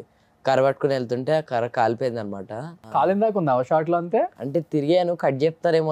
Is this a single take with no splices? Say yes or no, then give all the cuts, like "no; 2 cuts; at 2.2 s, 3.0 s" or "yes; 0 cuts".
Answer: no; 2 cuts; at 2.8 s, 4.4 s